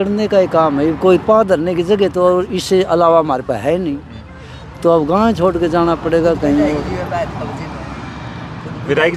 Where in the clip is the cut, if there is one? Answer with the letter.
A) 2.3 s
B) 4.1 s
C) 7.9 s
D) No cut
D